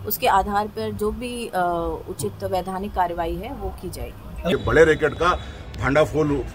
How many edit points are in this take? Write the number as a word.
one